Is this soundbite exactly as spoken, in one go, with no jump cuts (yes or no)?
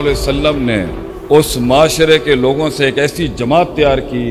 yes